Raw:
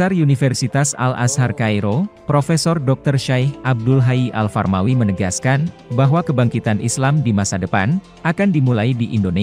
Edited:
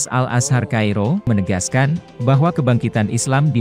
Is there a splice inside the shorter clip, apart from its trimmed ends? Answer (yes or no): yes